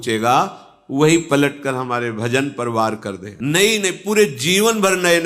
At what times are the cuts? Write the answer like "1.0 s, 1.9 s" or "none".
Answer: 3.3 s